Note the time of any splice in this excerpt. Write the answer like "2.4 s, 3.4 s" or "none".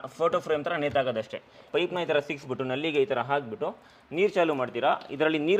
1.7 s